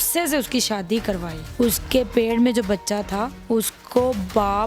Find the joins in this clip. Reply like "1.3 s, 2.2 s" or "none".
1.4 s, 3.4 s